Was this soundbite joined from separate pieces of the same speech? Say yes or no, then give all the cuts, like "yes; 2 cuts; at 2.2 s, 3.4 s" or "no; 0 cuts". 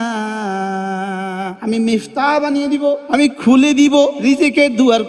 yes; 3 cuts; at 1.5 s, 3.0 s, 4.2 s